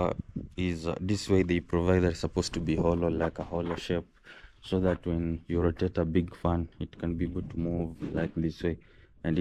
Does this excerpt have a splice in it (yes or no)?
no